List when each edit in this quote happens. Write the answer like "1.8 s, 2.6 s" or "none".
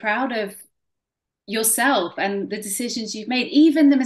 none